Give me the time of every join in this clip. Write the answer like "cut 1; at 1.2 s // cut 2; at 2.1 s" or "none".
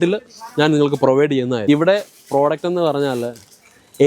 cut 1; at 1.6 s